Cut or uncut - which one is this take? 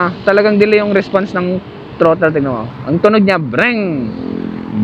cut